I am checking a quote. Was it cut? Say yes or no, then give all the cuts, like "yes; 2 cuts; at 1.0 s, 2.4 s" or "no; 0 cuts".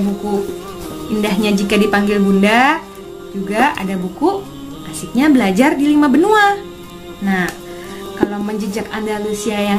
no; 0 cuts